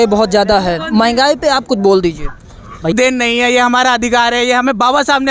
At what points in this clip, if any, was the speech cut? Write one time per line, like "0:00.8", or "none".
0:02.9